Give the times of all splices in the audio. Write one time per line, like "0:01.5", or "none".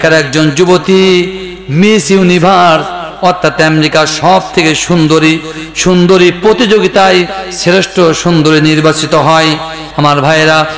0:09.9